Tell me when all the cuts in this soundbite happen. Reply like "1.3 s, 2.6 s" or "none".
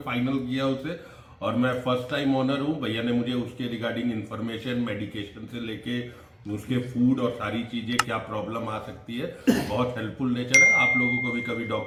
none

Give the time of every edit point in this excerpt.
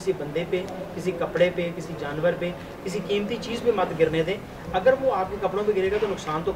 none

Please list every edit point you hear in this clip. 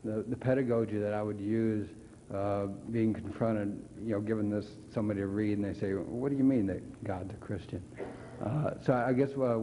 none

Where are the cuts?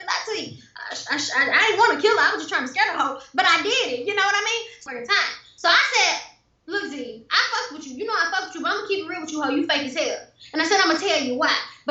4.8 s

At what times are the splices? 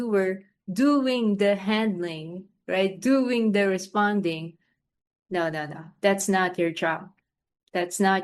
none

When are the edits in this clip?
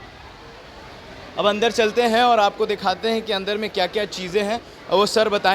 none

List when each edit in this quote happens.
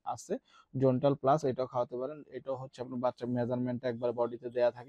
none

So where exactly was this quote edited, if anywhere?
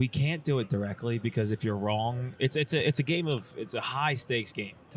none

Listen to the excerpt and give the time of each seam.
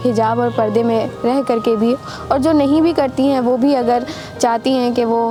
none

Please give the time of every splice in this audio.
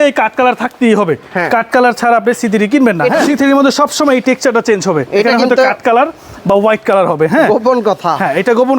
3.3 s

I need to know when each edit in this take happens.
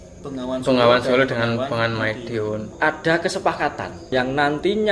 2.7 s, 4.1 s

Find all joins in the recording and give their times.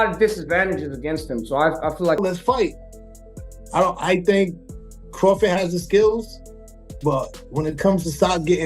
2.2 s

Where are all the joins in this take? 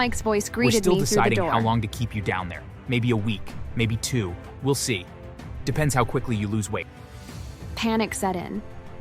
1.5 s

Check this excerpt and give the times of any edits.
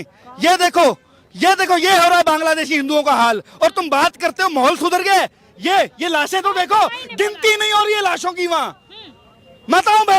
none

